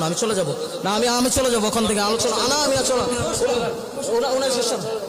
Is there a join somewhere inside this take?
no; 0 cuts

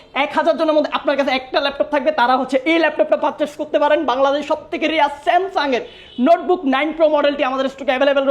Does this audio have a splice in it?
no; 0 cuts

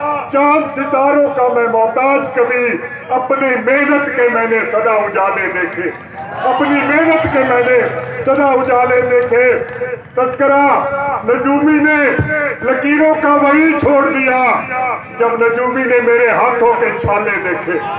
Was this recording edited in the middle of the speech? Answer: no; 0 cuts

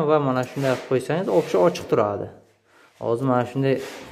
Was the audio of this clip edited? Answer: no; 0 cuts

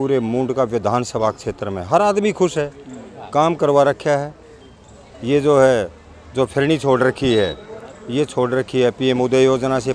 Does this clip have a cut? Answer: no; 0 cuts

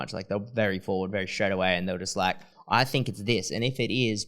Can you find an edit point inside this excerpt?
yes; 1 cut; at 2.5 s

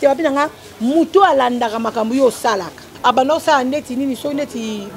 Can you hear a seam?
yes; 1 cut; at 2.8 s

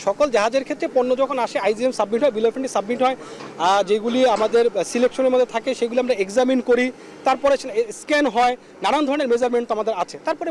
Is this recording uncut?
yes; 0 cuts

